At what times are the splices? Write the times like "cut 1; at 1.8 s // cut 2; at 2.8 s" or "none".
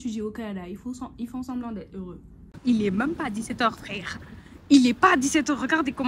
cut 1; at 2.6 s